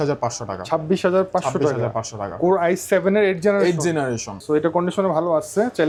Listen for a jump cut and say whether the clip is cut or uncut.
uncut